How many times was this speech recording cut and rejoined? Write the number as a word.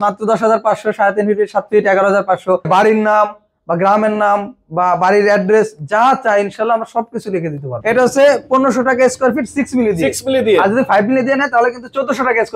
two